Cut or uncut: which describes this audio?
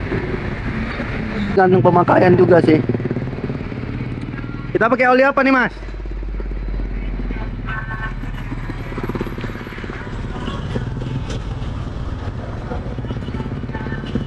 cut